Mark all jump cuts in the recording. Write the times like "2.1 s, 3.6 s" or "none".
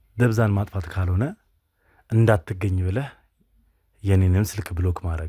none